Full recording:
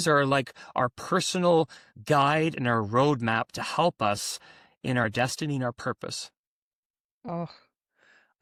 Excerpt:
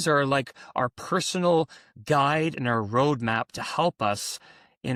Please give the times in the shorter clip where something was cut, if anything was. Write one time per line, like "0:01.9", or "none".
none